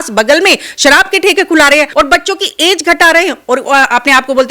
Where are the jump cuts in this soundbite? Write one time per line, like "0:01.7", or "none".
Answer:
0:01.9